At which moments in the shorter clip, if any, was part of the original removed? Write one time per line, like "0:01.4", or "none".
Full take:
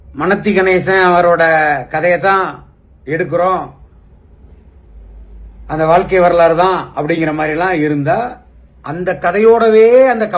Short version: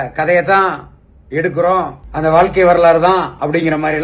0:02.0